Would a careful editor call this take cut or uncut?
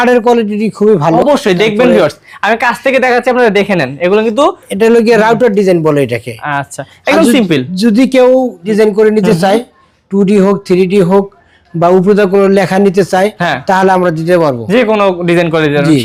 uncut